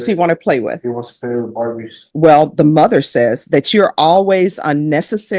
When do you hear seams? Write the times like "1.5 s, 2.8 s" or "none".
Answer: 2.0 s